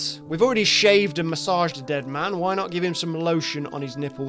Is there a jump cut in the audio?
no; 0 cuts

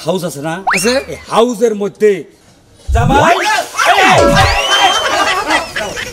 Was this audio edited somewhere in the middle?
yes; 1 cut; at 2.2 s

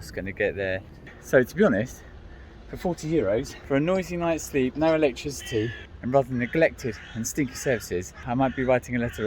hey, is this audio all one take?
no; 3 cuts; at 1.2 s, 3.6 s, 8.2 s

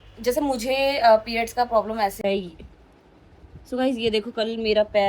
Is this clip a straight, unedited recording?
no; 1 cut; at 2.2 s

